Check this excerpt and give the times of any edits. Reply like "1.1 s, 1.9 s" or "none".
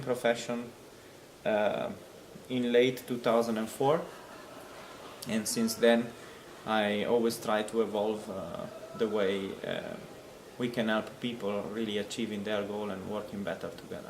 1.2 s